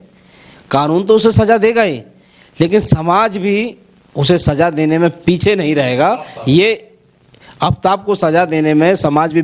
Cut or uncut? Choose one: uncut